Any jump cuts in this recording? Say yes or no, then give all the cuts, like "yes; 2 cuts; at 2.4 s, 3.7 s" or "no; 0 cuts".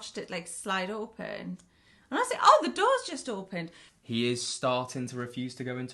yes; 1 cut; at 3.8 s